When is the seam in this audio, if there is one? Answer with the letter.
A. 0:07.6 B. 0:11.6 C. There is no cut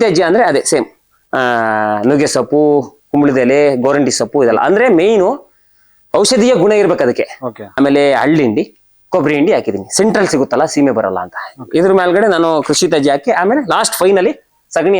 A